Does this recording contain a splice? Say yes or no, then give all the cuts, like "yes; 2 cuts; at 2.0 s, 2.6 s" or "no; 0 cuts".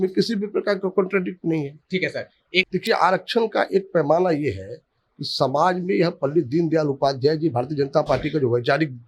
yes; 1 cut; at 2.7 s